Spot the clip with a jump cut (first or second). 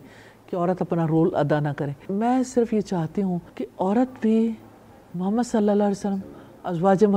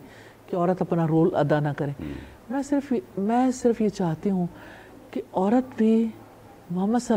first